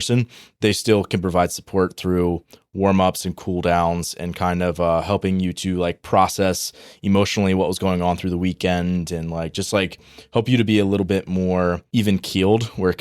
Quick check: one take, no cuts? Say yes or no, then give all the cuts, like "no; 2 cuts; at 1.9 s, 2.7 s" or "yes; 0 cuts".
no; 1 cut; at 11.8 s